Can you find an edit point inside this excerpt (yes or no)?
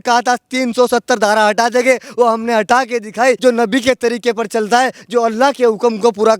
yes